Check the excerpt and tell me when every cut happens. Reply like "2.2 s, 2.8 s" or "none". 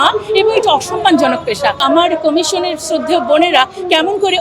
1.8 s